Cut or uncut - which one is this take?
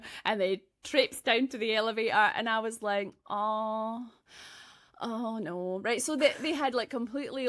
uncut